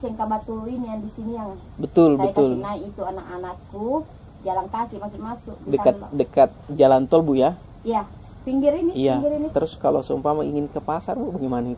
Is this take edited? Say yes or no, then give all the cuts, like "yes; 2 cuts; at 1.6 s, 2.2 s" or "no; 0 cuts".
yes; 1 cut; at 9.5 s